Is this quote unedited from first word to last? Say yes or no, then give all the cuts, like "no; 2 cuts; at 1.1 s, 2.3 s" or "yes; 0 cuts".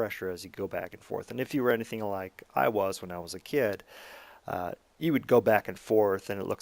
no; 1 cut; at 4.6 s